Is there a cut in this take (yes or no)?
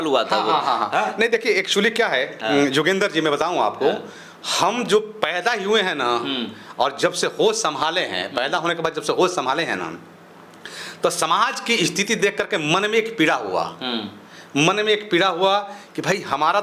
no